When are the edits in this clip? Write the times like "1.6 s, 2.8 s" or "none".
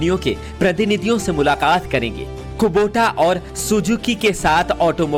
none